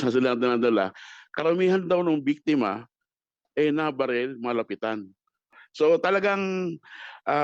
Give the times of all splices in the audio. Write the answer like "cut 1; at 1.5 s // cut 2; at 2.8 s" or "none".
cut 1; at 5.6 s

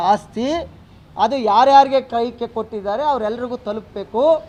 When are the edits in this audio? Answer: none

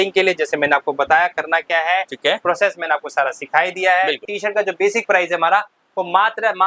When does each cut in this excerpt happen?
cut 1; at 4.3 s

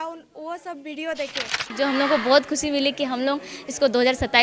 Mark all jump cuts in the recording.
cut 1; at 1.7 s

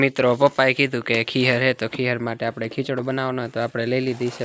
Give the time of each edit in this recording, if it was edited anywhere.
none

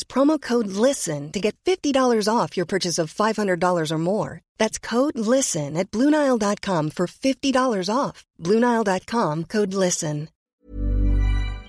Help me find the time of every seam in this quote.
cut 1; at 10.5 s

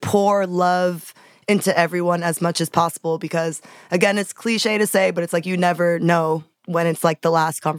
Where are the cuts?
cut 1; at 6.5 s

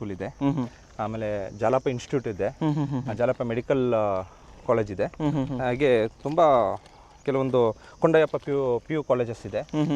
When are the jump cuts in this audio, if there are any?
none

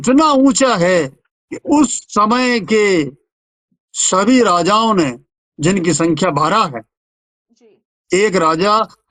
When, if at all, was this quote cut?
none

